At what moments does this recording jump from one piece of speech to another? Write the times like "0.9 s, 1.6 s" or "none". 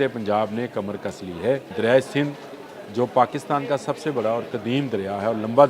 1.7 s